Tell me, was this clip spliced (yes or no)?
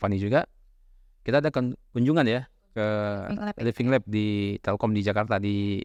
no